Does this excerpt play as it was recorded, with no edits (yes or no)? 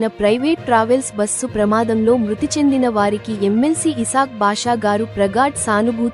yes